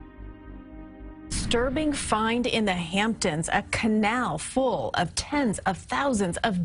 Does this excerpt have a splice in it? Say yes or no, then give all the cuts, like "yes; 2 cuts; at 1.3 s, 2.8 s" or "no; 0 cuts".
yes; 1 cut; at 5.2 s